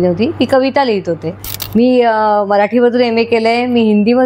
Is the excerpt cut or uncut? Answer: cut